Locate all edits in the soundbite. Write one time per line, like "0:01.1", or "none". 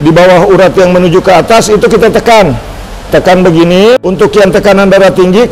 0:04.0

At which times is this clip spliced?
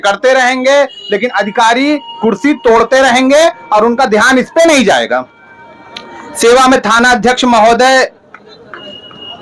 none

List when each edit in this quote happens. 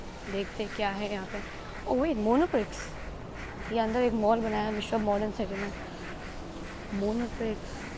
none

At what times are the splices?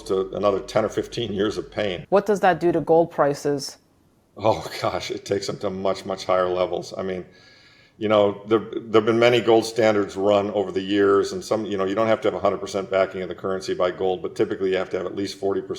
0:02.0

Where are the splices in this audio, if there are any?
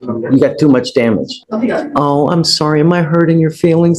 0:01.4

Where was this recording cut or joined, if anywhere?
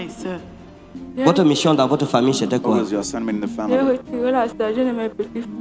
0:00.9

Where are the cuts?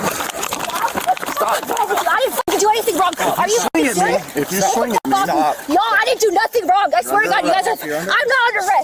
none

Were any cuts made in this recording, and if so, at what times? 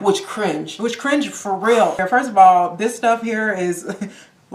0:02.0

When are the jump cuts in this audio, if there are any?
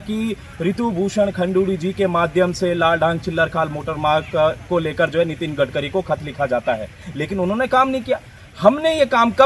none

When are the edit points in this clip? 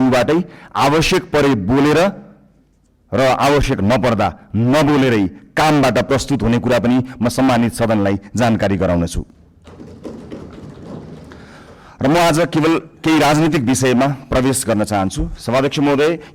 none

